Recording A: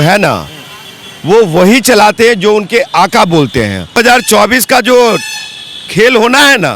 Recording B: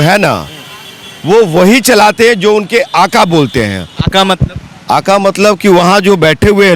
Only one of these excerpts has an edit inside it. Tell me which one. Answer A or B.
A